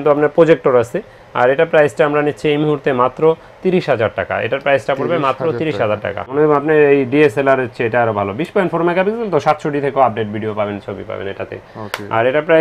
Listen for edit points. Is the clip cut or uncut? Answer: uncut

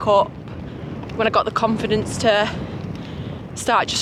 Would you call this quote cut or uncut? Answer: uncut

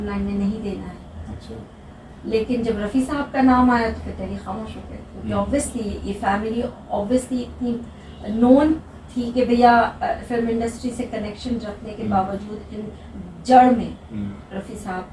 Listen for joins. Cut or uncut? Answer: uncut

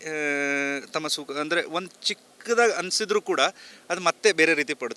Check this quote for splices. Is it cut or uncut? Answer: uncut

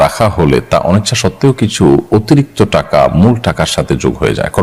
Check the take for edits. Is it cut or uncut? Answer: uncut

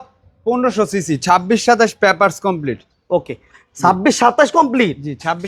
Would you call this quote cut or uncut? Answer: uncut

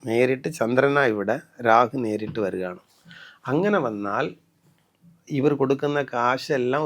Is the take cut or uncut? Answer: uncut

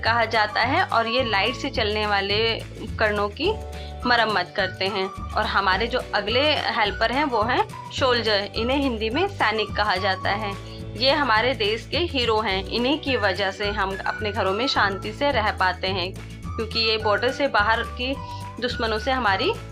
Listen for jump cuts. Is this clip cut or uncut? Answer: uncut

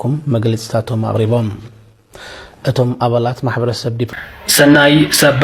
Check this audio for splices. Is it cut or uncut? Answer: cut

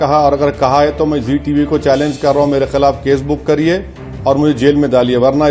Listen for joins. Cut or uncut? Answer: uncut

